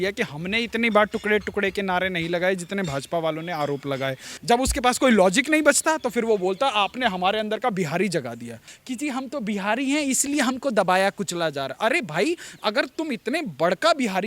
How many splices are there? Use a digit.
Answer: 2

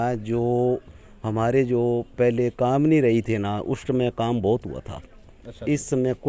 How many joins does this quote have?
0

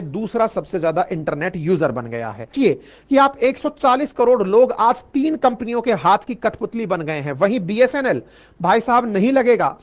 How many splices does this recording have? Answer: 1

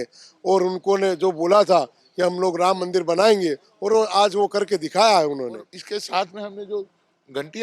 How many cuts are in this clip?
1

